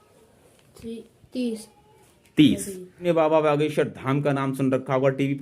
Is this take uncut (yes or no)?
no